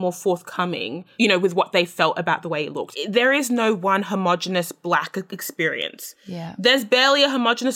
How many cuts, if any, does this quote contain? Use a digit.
1